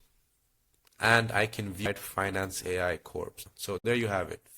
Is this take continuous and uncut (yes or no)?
no